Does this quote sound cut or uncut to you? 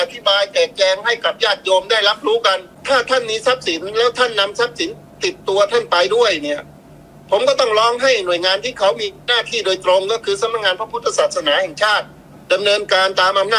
cut